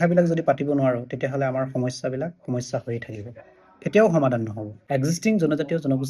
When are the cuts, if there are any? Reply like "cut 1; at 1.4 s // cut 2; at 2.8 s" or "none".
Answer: cut 1; at 4.7 s